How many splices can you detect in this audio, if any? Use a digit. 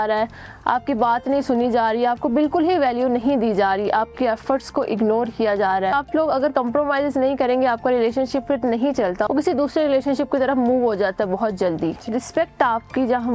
3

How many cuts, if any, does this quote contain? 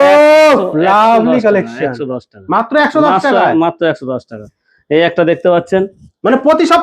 0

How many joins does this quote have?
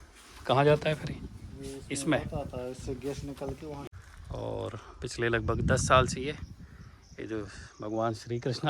1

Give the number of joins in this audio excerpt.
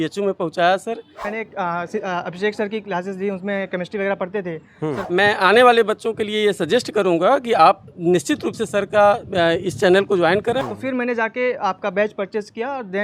3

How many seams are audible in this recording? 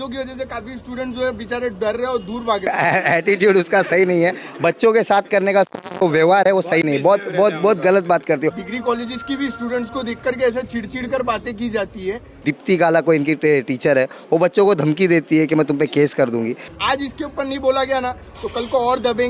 4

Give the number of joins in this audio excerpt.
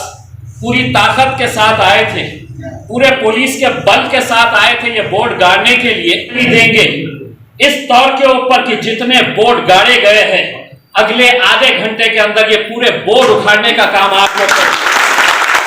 1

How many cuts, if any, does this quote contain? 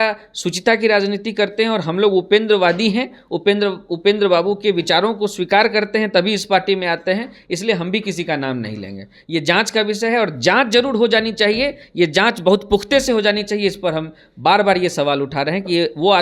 0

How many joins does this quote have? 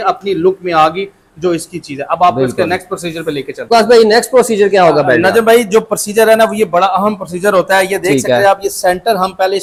0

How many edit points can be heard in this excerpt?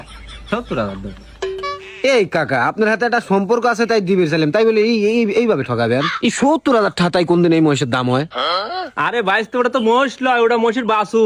0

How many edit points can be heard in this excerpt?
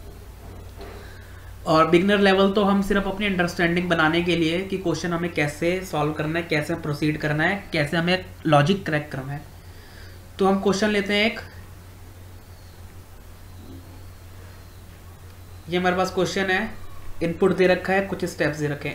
1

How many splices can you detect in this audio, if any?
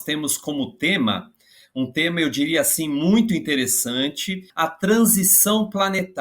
1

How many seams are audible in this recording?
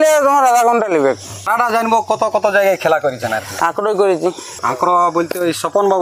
2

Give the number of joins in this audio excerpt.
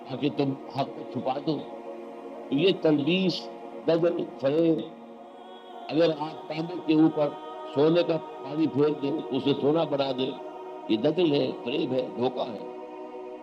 0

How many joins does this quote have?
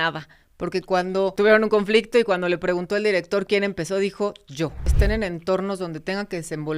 2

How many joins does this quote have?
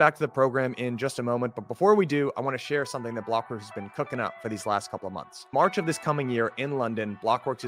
0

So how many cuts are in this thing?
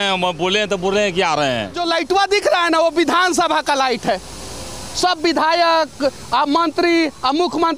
1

